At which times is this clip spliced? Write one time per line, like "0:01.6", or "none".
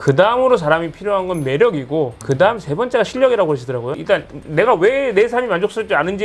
0:03.9